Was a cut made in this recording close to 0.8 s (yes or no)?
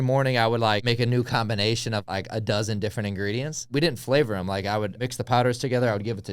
yes